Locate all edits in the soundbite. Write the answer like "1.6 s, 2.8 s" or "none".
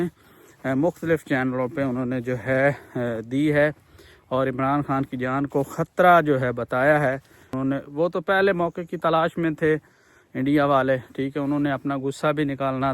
7.5 s